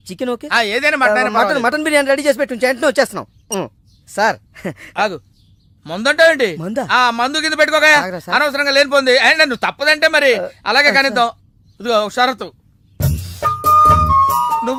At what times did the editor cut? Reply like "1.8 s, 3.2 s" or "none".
none